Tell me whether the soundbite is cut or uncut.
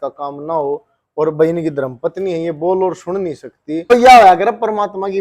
cut